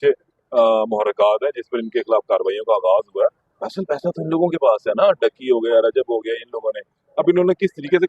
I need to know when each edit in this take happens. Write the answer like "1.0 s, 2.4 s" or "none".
3.5 s